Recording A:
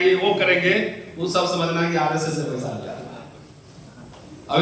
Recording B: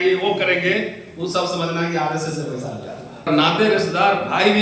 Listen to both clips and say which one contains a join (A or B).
B